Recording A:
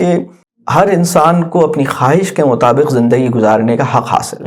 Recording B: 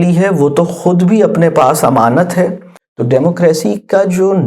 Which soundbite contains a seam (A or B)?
B